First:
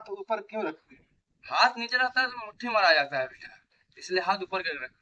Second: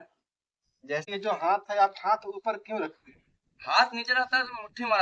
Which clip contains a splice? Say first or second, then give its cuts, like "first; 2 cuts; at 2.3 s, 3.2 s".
second; 1 cut; at 1.1 s